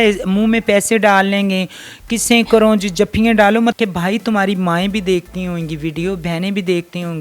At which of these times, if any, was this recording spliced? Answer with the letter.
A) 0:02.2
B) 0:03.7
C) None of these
B